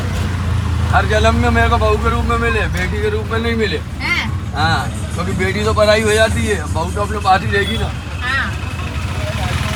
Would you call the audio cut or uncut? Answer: uncut